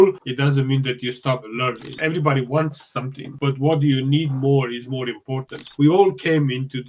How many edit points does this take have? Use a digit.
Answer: 2